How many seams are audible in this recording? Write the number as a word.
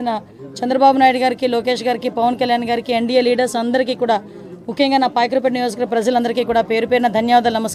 zero